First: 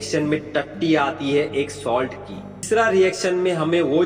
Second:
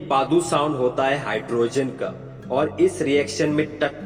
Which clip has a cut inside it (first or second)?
first